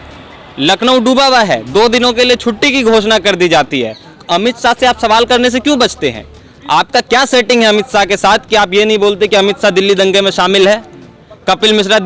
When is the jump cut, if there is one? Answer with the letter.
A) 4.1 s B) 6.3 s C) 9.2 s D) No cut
A